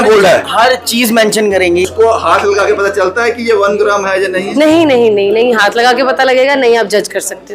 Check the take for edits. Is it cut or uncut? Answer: cut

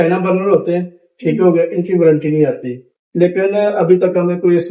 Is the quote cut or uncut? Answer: uncut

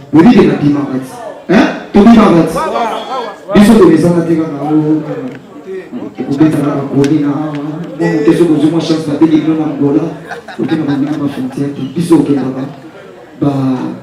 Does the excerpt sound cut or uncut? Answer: uncut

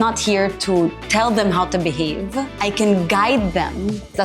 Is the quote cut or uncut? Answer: cut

